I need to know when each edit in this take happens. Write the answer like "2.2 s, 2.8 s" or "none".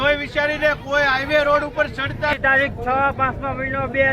2.4 s